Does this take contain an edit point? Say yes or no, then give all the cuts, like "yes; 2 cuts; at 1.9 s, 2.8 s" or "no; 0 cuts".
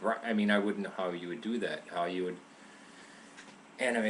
yes; 1 cut; at 2.5 s